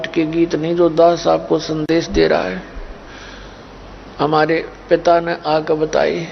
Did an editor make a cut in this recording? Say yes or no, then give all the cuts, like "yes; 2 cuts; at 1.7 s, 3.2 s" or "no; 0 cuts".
yes; 1 cut; at 1.0 s